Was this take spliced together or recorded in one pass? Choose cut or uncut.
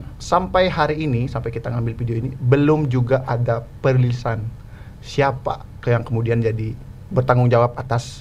uncut